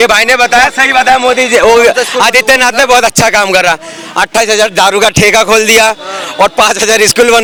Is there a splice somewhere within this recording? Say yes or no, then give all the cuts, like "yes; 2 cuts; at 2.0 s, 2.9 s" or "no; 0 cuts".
no; 0 cuts